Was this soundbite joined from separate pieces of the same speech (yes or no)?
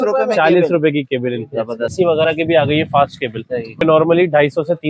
yes